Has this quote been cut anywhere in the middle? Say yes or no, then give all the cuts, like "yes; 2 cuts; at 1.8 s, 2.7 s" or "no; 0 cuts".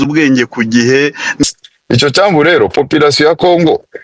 yes; 1 cut; at 1.4 s